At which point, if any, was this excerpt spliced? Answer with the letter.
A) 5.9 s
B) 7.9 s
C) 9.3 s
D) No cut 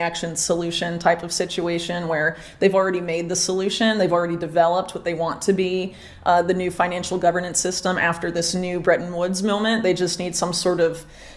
D